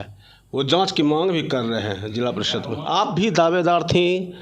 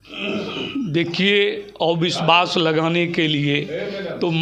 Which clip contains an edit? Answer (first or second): first